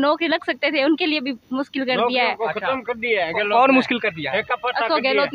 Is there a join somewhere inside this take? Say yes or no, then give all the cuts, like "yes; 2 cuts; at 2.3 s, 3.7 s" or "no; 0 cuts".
no; 0 cuts